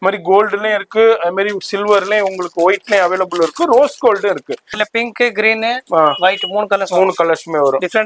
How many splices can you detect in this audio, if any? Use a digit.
1